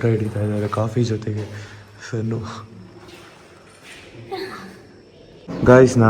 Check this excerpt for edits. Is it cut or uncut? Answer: uncut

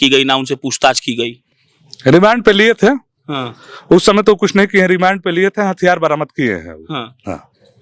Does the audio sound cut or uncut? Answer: uncut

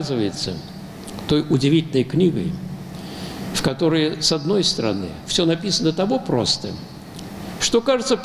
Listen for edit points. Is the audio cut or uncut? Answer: uncut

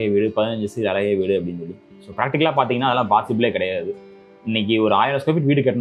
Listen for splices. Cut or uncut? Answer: uncut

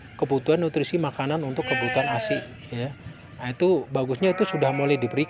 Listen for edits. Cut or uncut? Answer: uncut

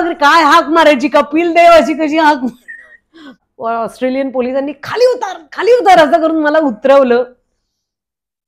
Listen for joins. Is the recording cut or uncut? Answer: cut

